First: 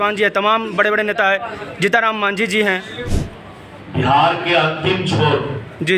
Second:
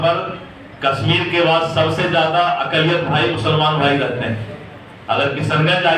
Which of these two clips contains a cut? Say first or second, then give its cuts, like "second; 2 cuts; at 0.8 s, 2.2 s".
first; 1 cut; at 3.1 s